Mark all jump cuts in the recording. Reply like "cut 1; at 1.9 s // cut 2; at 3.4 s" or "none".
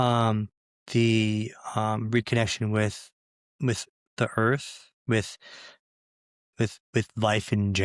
none